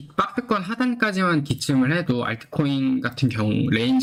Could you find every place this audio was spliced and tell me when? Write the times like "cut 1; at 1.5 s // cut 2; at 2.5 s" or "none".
none